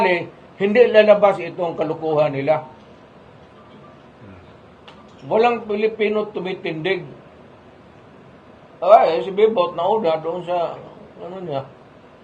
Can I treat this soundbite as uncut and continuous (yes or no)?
yes